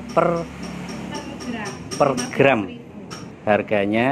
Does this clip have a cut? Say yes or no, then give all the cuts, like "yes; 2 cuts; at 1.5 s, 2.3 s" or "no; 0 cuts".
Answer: no; 0 cuts